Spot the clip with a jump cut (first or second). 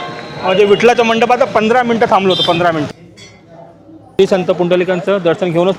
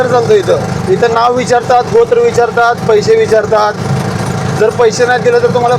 first